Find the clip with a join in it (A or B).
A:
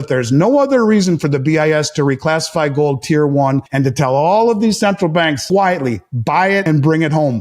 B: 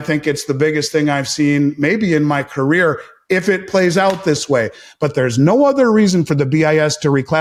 A